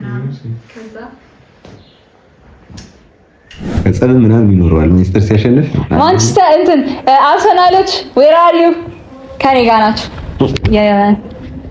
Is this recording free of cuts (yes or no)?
no